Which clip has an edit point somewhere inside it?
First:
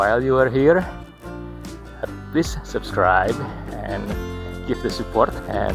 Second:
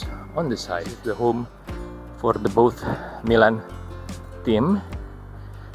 second; 1 cut; at 0.9 s

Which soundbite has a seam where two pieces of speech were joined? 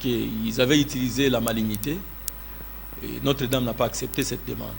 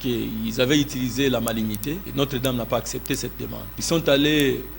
second; 2 cuts; at 2.1 s, 3.7 s

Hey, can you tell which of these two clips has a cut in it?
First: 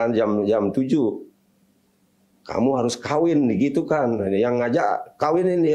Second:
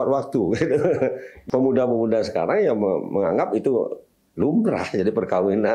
second; 1 cut; at 1.3 s

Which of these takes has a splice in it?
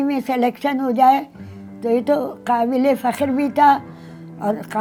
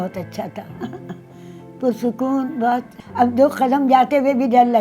second; 1 cut; at 3.0 s

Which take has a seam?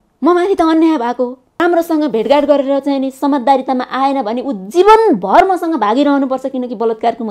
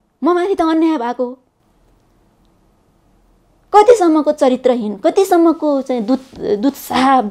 first; 1 cut; at 1.6 s

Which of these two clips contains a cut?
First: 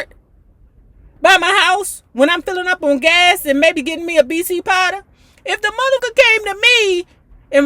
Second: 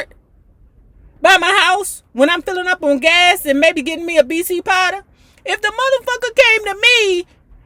first; 1 cut; at 6.0 s

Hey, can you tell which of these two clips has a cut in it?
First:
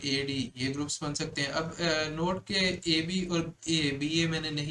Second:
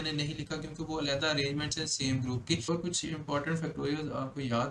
second; 1 cut; at 2.6 s

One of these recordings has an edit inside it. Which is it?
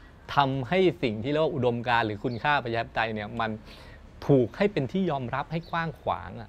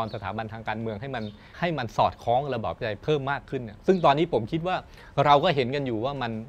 second; 1 cut; at 1.4 s

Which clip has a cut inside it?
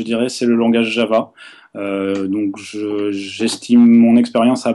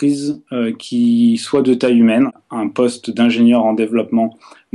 second; 1 cut; at 2.4 s

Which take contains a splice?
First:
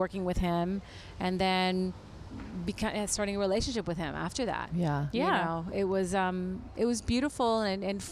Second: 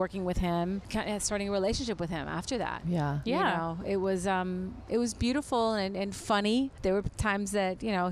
second; 2 cuts; at 0.9 s, 6.7 s

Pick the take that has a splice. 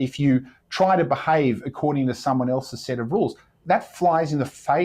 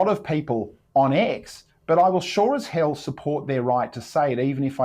first; 1 cut; at 3.6 s

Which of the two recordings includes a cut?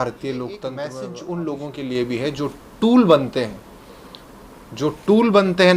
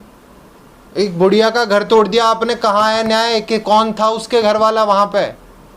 first; 1 cut; at 0.9 s

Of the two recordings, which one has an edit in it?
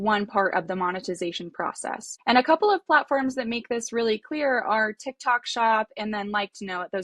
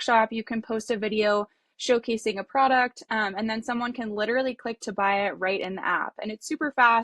first; 1 cut; at 2.1 s

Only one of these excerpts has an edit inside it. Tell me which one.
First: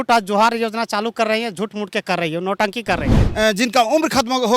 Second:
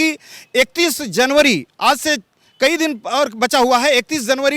first; 1 cut; at 3.2 s

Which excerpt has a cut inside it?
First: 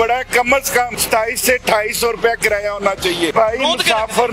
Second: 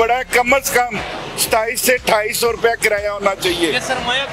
first; 2 cuts; at 1.0 s, 3.3 s

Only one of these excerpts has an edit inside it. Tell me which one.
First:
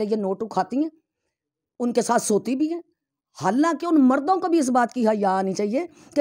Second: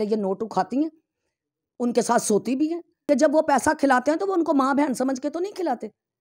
second; 1 cut; at 2.9 s

